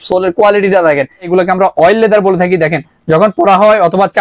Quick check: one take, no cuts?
no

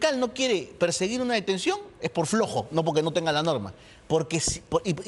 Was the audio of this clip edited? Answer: no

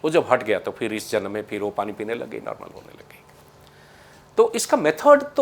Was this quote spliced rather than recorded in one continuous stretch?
no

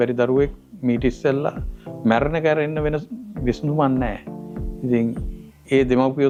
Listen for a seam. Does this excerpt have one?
no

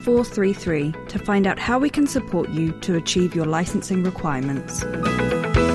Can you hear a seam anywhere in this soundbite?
yes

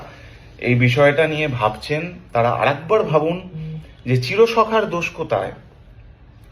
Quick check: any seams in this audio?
no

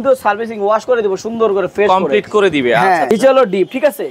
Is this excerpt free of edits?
no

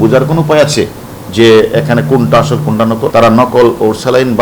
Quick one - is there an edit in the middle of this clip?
yes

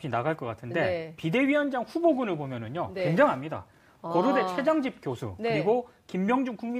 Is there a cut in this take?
no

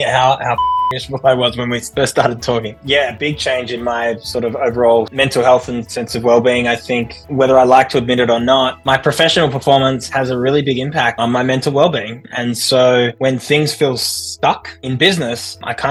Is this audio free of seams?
yes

